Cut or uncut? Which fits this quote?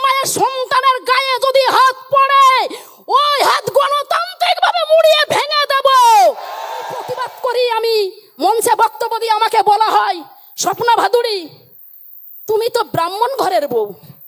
cut